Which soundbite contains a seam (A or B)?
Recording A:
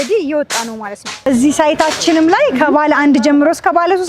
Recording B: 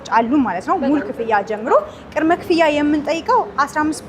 A